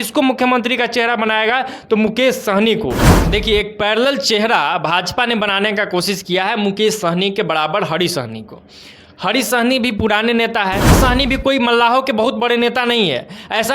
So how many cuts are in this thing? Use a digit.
2